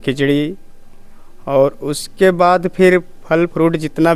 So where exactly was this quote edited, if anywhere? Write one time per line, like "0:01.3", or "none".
none